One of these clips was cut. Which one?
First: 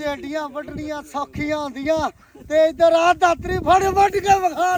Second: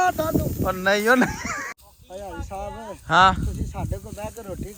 second; 1 cut; at 1.7 s

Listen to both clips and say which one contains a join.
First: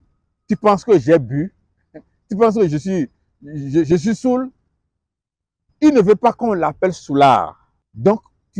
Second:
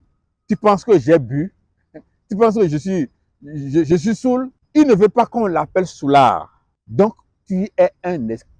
second; 1 cut; at 4.6 s

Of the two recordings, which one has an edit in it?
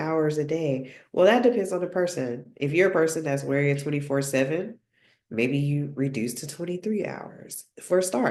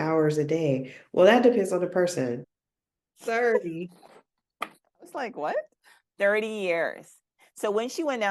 second; 1 cut; at 2.5 s

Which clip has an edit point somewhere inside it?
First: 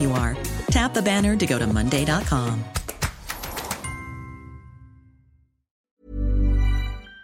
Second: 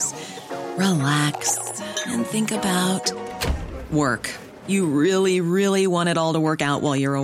first; 1 cut; at 6.0 s

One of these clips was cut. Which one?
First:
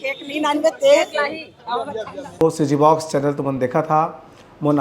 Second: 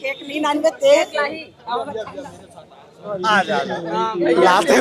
first; 1 cut; at 2.2 s

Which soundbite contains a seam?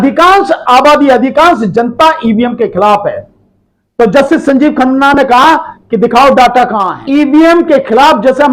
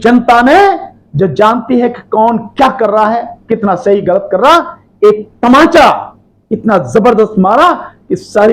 first; 1 cut; at 6.9 s

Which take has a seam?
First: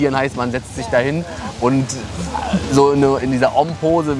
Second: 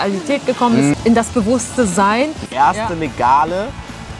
second; 2 cuts; at 0.9 s, 2.4 s

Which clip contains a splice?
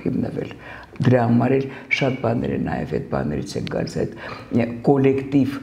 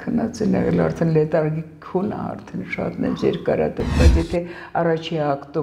second; 1 cut; at 3.9 s

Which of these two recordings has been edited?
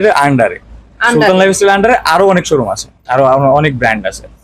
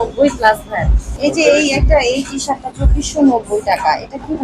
second; 1 cut; at 1.1 s

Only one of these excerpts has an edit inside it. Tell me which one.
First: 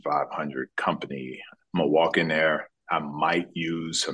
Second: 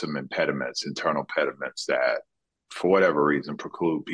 first; 1 cut; at 1.4 s

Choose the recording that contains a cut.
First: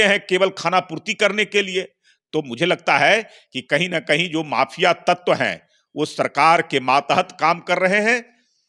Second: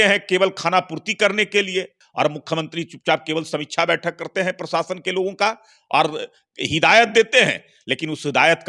second; 1 cut; at 2.0 s

